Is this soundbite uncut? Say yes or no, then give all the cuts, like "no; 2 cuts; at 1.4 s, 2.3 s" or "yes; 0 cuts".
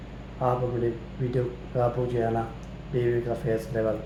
yes; 0 cuts